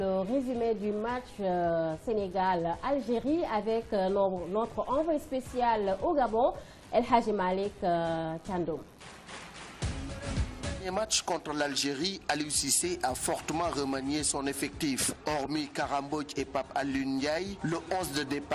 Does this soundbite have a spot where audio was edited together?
yes; 1 cut; at 12.6 s

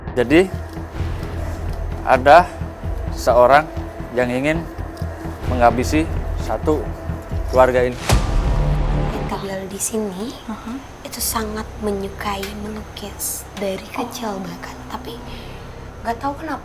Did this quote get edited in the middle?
yes; 1 cut; at 9.3 s

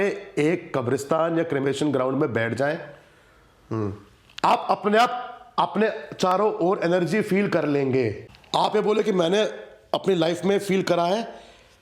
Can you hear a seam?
yes; 1 cut; at 8.2 s

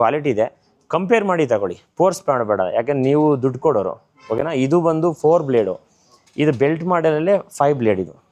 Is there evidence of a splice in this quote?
no; 0 cuts

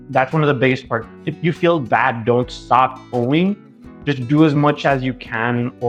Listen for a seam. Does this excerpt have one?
no; 0 cuts

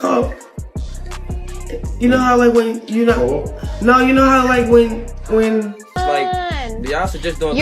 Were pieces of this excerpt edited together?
yes; 1 cut; at 5.8 s

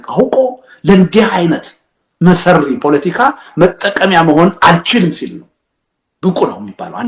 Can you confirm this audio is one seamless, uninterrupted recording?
yes; 0 cuts

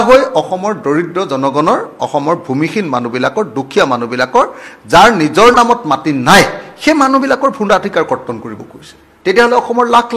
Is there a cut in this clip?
no; 0 cuts

